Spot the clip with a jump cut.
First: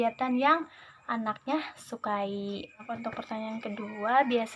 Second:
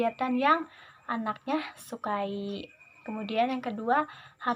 first; 1 cut; at 2.9 s

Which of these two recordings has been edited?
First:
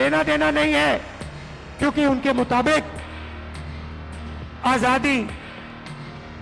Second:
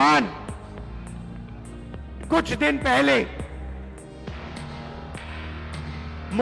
first; 1 cut; at 5.3 s

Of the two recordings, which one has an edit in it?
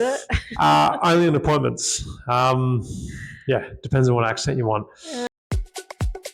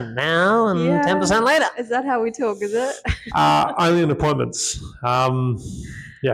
first; 1 cut; at 5.3 s

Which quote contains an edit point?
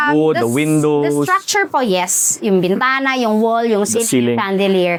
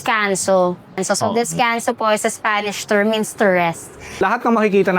second; 2 cuts; at 1.0 s, 4.2 s

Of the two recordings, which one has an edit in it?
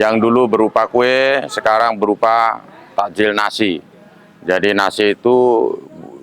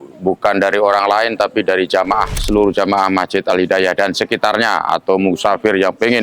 second; 1 cut; at 2.4 s

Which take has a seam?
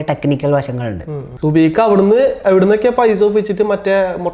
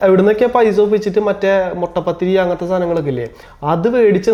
first; 1 cut; at 1.2 s

